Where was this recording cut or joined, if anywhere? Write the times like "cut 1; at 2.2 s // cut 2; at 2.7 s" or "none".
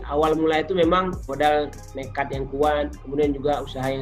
cut 1; at 1.2 s